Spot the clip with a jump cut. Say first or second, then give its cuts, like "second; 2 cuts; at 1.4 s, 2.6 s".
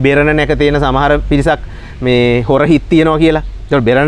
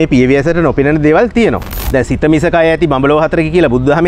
second; 1 cut; at 1.7 s